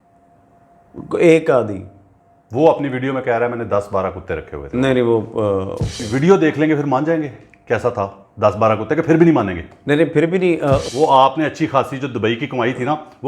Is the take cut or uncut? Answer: cut